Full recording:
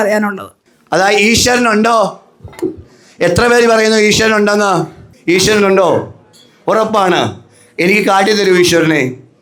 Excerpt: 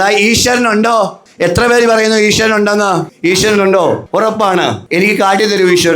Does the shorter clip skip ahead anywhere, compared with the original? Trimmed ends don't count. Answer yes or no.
yes